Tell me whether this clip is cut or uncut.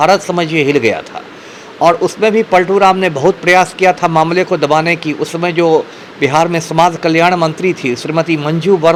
uncut